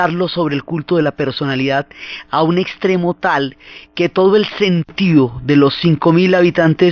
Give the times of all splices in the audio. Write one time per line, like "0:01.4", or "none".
0:02.2